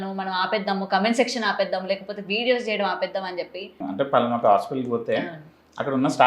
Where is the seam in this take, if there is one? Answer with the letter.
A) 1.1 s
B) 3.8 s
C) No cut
B